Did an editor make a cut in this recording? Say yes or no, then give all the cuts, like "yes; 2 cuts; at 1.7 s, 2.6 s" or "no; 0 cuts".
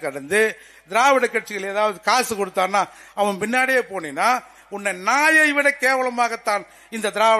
no; 0 cuts